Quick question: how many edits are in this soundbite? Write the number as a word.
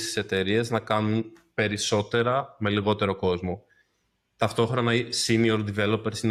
zero